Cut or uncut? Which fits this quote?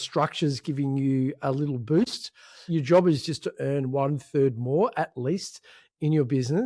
cut